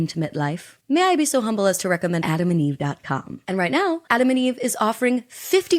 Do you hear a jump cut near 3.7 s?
yes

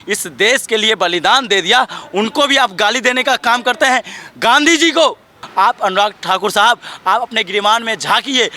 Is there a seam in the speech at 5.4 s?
yes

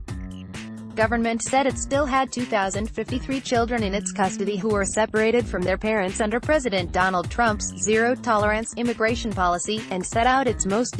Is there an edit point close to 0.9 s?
yes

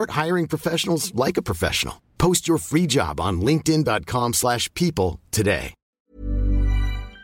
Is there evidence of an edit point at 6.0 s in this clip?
yes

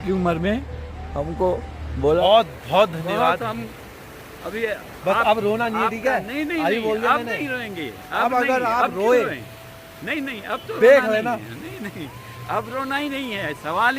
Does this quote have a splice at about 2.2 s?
yes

